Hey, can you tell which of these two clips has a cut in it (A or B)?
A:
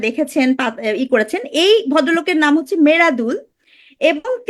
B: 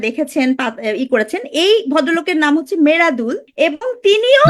B